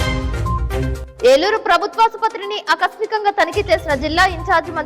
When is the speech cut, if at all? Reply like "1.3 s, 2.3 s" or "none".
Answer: 1.0 s